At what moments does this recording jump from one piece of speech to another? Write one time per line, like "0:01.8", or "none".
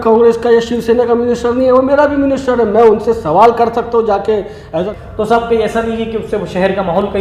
0:04.8